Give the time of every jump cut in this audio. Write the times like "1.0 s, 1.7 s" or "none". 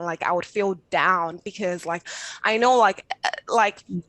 none